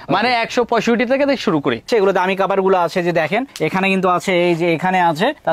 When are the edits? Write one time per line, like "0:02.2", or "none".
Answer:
0:01.9